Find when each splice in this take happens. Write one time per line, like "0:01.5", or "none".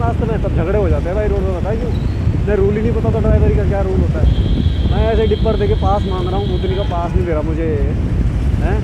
none